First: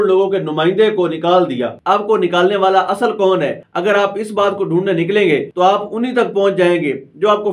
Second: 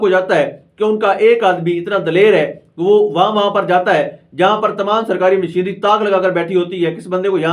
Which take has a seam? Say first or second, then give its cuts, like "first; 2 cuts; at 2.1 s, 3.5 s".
first; 3 cuts; at 1.7 s, 3.6 s, 5.5 s